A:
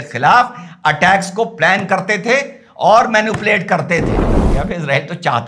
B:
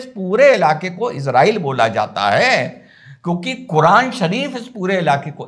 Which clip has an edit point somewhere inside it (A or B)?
A